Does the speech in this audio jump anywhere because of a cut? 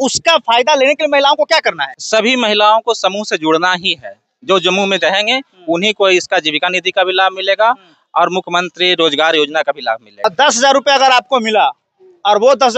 yes; 2 cuts; at 1.9 s, 10.2 s

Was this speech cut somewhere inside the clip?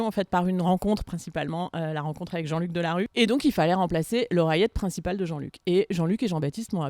yes; 1 cut; at 3.1 s

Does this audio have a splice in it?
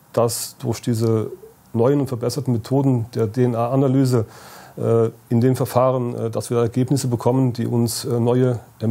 no; 0 cuts

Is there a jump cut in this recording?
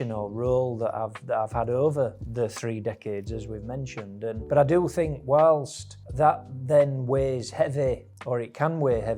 no; 0 cuts

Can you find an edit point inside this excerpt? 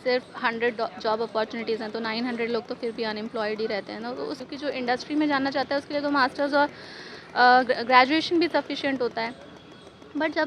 yes; 1 cut; at 4.5 s

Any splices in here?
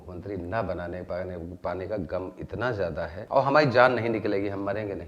yes; 1 cut; at 3.2 s

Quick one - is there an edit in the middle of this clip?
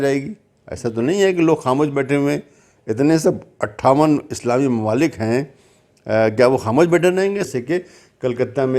yes; 1 cut; at 7.5 s

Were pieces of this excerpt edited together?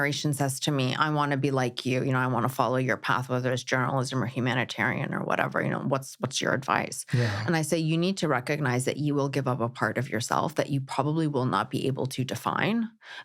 no; 0 cuts

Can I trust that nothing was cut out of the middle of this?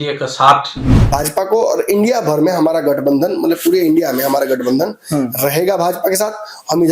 no; 1 cut; at 1.0 s

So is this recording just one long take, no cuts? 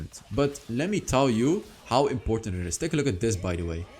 yes; 0 cuts

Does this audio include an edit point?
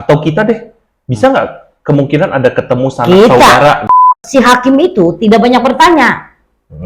yes; 1 cut; at 4.2 s

